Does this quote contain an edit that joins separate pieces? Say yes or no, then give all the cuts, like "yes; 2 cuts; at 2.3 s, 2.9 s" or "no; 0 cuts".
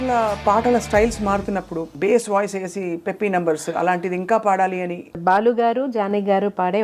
yes; 2 cuts; at 1.9 s, 5.2 s